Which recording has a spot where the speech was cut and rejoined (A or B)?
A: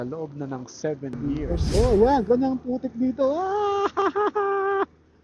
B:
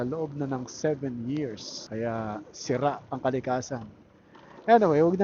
A